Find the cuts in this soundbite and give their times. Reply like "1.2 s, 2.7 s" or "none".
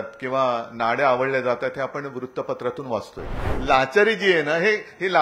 3.5 s